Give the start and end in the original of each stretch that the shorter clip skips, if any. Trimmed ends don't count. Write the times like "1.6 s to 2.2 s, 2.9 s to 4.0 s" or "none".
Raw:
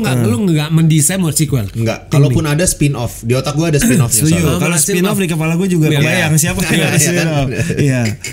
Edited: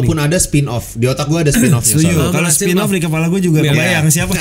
none